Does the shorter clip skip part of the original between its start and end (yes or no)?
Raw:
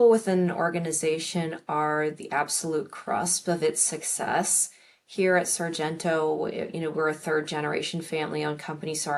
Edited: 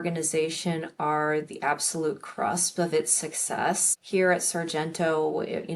yes